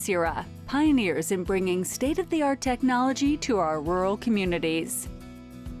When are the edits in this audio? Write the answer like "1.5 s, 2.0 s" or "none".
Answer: 4.9 s

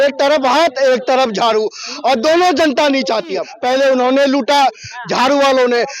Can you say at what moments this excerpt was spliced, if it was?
3.5 s

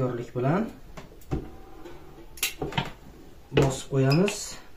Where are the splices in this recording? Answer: none

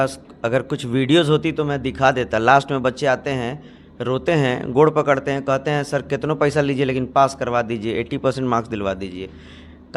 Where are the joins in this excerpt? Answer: none

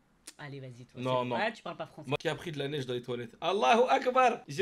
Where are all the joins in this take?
2.2 s

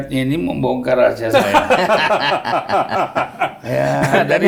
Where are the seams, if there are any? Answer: none

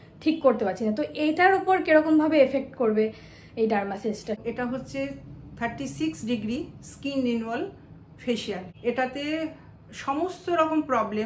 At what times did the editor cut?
4.4 s, 8.7 s

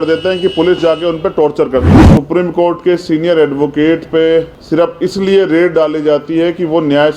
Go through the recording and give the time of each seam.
2.0 s, 4.6 s

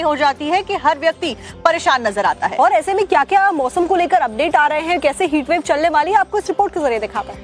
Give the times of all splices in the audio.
6.3 s

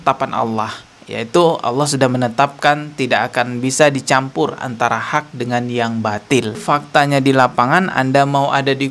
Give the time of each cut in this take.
6.6 s

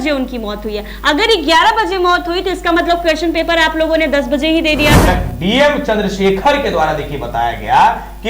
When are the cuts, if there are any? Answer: 5.0 s

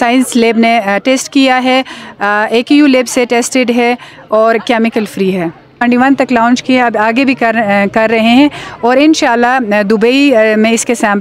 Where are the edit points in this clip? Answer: 5.8 s

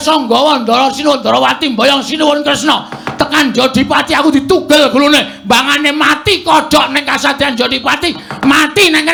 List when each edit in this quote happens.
none

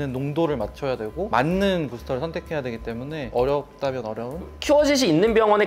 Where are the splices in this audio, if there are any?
1.3 s, 4.5 s

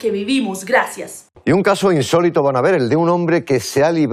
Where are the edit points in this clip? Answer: 1.4 s

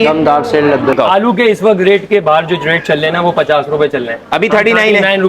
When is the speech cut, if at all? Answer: 0.9 s

